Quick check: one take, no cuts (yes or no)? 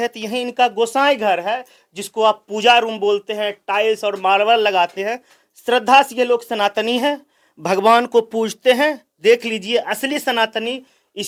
yes